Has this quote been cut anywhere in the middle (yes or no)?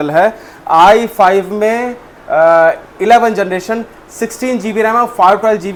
no